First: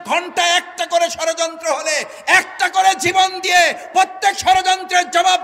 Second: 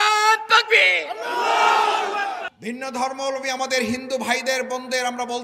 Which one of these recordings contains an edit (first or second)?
second